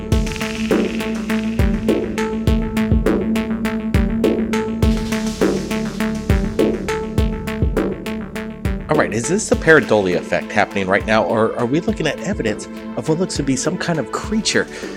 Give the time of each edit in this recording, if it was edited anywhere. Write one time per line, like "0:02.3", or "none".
0:11.5